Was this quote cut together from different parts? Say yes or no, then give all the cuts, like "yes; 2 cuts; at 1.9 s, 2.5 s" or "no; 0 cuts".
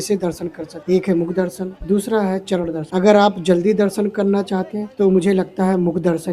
no; 0 cuts